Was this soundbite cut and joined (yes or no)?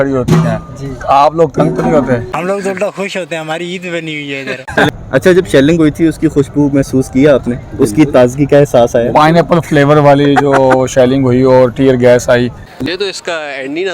yes